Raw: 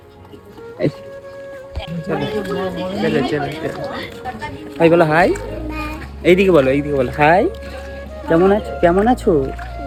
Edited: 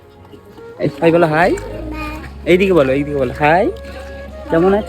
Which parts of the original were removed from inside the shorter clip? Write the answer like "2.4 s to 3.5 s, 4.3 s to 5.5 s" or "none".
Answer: 0.9 s to 4.7 s